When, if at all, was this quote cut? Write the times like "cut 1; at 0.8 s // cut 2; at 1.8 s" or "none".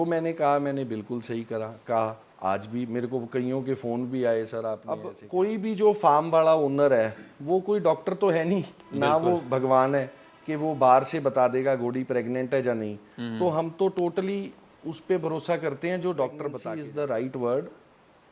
cut 1; at 5.1 s // cut 2; at 16.6 s